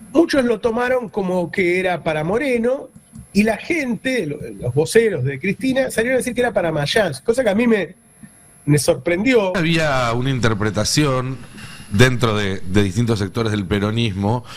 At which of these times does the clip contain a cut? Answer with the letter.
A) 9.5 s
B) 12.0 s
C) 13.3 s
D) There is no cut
A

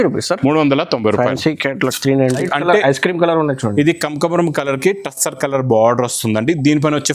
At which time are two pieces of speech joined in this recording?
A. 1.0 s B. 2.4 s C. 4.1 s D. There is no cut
B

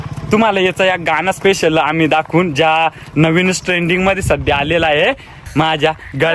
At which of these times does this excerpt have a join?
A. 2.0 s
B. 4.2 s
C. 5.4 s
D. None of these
C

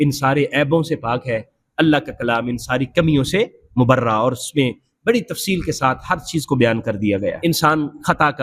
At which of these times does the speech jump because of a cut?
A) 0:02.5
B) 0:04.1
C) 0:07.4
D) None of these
C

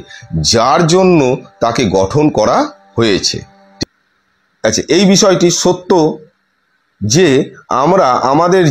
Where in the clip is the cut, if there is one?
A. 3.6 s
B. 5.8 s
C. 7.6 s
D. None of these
A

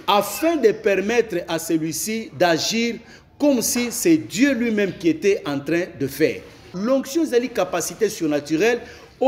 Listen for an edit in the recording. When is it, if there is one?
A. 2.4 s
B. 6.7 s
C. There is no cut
B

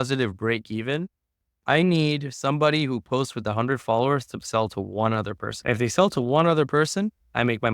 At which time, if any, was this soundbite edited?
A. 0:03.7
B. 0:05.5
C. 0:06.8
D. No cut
B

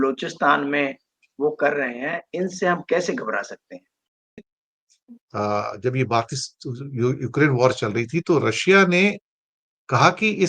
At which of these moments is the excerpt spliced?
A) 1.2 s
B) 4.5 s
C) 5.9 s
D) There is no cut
B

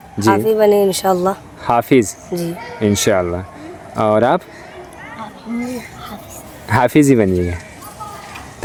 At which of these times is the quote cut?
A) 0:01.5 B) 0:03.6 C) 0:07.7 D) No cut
D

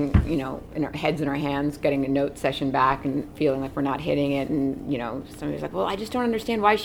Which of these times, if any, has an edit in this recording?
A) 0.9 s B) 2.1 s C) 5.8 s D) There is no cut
D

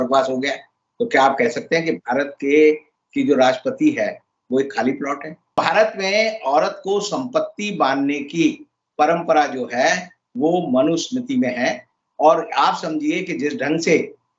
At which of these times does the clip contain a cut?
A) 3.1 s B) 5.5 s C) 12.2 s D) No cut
B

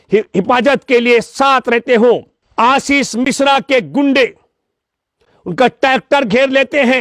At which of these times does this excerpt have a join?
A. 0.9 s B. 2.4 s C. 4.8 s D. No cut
B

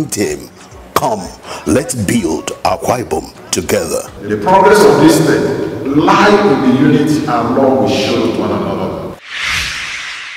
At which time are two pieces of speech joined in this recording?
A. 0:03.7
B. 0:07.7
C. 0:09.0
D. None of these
C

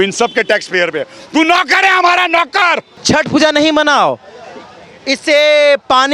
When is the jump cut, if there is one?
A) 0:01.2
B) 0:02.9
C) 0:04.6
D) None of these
B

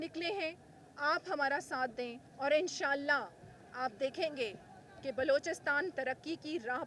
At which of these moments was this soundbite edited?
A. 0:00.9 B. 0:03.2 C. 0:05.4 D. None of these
D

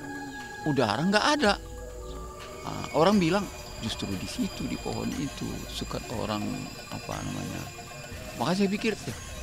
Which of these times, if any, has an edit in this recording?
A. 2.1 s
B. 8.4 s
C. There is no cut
C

